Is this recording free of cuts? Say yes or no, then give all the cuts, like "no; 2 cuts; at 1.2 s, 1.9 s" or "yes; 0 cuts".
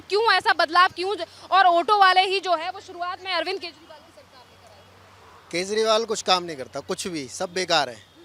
yes; 0 cuts